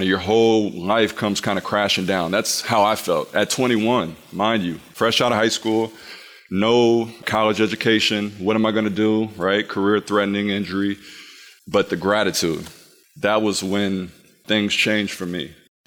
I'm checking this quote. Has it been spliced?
yes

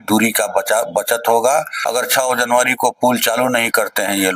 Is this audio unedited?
no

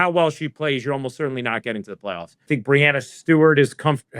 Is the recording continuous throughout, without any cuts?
no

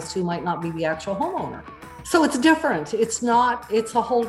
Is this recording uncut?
no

